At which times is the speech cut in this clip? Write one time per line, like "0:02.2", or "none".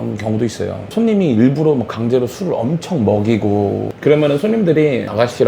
0:03.9

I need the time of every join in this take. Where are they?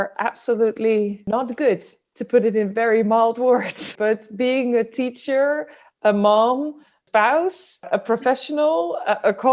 0:01.2
0:03.9
0:06.9
0:07.9

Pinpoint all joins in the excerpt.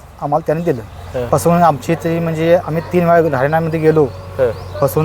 0:01.2

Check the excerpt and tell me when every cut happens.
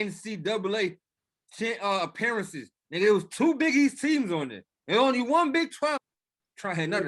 0:06.0

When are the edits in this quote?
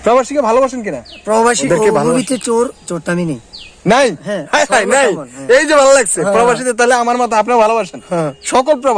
0:01.6

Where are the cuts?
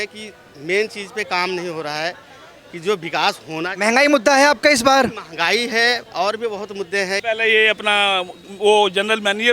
0:07.2

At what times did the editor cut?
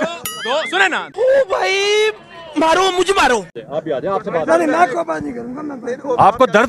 0:03.5

